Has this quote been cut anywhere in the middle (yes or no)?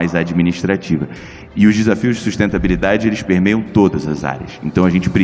no